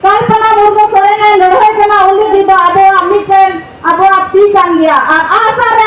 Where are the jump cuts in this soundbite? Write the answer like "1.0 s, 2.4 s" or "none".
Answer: 2.3 s

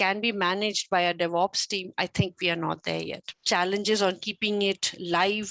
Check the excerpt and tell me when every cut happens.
3.4 s

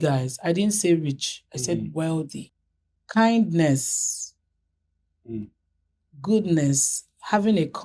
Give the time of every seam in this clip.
2.4 s

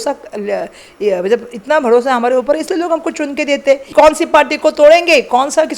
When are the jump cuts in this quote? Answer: 3.9 s

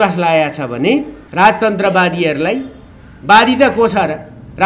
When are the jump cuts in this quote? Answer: 1.2 s

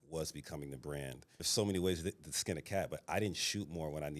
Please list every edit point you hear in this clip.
1.3 s

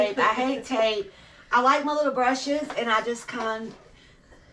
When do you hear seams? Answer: none

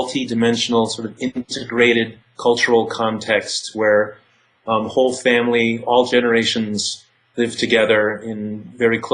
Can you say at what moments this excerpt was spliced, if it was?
2.6 s

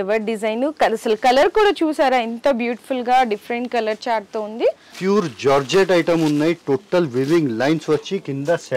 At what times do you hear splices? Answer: 4.9 s

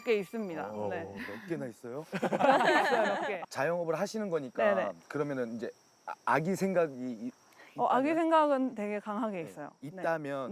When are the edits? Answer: 3.5 s

